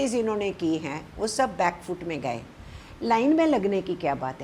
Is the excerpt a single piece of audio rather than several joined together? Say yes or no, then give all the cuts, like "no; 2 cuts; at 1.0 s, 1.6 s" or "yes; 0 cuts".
yes; 0 cuts